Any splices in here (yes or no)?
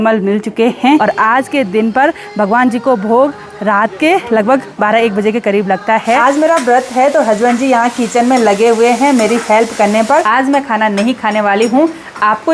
yes